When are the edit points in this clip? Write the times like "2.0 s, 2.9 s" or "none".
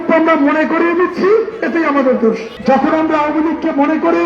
2.5 s